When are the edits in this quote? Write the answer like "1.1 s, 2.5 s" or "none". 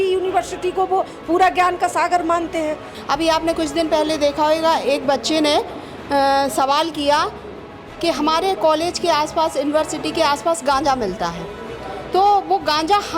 2.9 s

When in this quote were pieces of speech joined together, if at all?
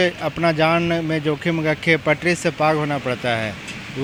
none

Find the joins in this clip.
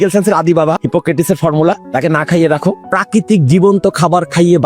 0.8 s, 1.8 s, 2.8 s

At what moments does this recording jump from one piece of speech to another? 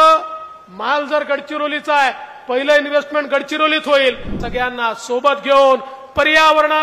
4.4 s

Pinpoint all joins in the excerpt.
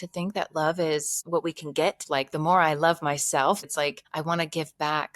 1.2 s, 2.0 s, 3.6 s

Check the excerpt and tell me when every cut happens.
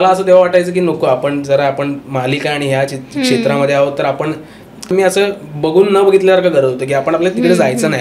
4.9 s

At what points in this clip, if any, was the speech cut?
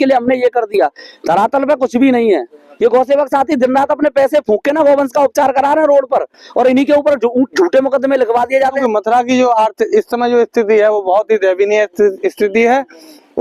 8.8 s

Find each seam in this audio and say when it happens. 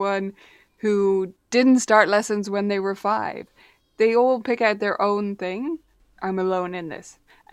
5.9 s

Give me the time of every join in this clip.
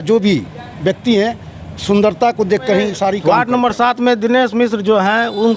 3.2 s

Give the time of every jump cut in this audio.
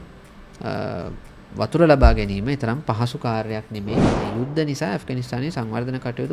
4.2 s

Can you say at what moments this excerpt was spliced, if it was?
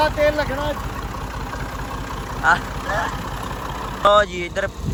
none

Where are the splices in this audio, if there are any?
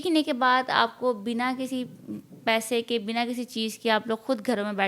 none

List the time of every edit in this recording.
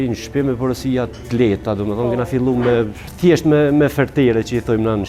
3.0 s

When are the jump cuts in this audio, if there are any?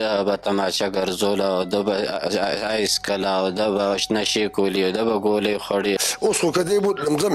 6.1 s

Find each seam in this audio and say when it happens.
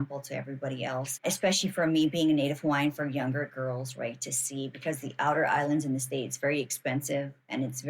1.1 s

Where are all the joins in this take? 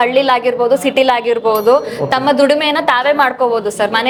none

